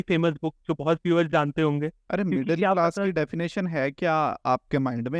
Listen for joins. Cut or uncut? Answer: cut